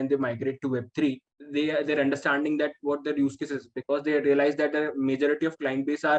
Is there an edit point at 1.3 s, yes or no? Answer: yes